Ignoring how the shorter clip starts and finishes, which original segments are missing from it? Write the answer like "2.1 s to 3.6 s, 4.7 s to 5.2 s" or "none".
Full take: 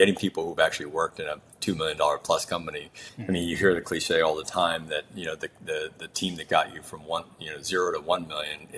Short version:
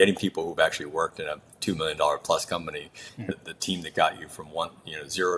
3.3 s to 5.9 s